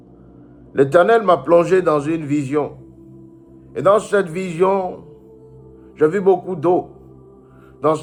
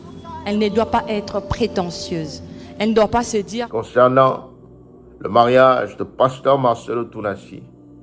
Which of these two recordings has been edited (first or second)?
second